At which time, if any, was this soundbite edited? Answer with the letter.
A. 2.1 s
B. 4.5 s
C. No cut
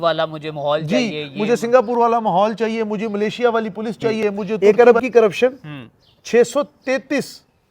B